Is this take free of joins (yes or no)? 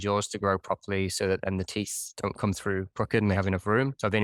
yes